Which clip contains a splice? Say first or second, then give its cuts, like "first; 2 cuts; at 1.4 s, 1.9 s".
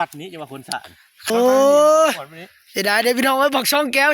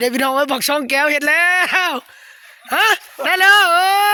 first; 1 cut; at 1.3 s